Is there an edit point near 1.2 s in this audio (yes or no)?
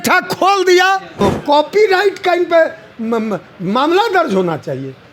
yes